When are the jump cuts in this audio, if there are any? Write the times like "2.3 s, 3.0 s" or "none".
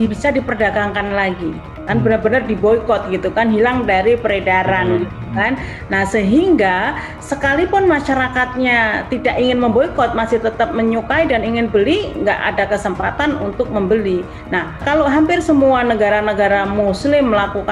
14.8 s